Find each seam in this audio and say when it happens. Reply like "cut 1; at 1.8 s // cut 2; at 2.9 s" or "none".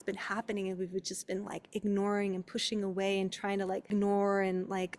cut 1; at 3.9 s